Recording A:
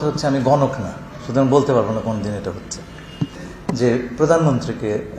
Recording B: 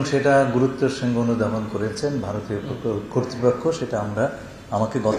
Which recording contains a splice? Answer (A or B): A